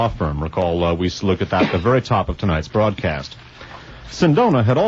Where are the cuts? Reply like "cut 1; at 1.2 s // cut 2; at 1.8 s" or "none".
cut 1; at 1.4 s